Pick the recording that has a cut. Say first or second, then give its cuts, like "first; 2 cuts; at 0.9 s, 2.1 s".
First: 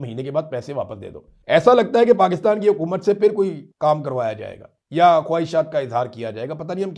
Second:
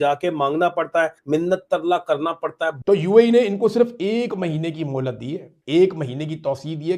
second; 1 cut; at 2.8 s